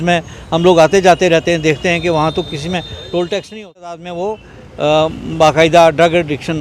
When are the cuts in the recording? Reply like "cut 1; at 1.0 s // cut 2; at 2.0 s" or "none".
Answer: cut 1; at 3.9 s